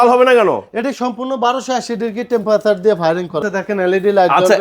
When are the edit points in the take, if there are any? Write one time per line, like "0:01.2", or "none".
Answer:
0:03.4